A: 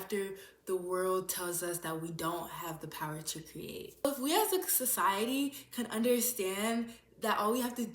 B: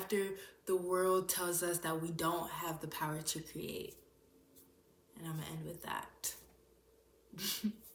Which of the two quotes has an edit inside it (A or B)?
A